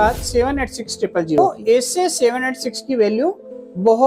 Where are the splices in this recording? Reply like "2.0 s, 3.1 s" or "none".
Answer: 1.4 s

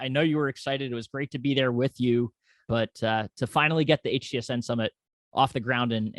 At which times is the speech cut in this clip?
2.7 s

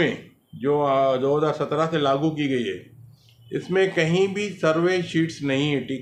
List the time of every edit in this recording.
none

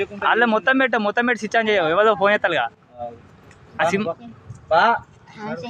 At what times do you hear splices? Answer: none

